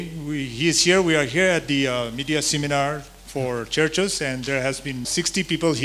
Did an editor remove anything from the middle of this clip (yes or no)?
no